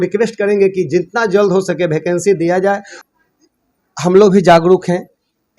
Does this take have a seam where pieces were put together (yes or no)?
yes